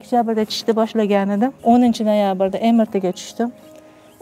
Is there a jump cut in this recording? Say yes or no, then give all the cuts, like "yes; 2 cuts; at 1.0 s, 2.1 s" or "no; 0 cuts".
yes; 1 cut; at 1.6 s